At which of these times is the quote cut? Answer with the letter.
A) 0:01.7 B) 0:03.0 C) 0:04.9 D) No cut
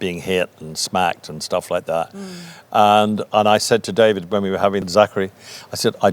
D